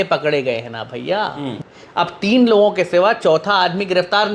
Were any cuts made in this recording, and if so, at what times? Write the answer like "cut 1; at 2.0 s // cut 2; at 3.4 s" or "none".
cut 1; at 1.5 s